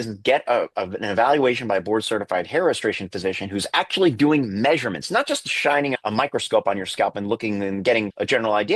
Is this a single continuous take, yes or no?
yes